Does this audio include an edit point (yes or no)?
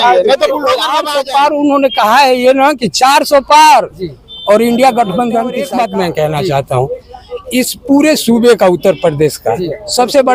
yes